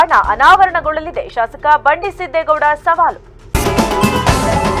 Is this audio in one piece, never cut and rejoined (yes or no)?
no